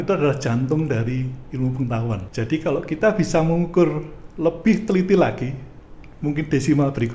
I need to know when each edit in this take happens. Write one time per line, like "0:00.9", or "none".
0:02.3